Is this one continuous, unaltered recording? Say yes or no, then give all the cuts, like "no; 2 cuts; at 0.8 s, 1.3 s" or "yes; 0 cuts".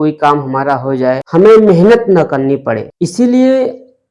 no; 2 cuts; at 1.2 s, 2.9 s